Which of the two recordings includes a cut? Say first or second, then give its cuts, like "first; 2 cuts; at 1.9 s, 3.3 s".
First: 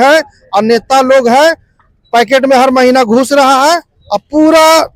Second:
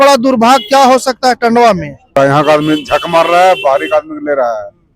second; 1 cut; at 2.2 s